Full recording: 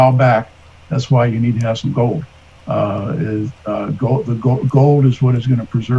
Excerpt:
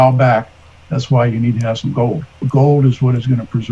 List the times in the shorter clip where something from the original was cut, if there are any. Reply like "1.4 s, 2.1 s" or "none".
2.4 s